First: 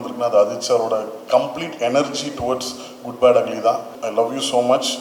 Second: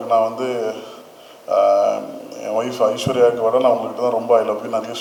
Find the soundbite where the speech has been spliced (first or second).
first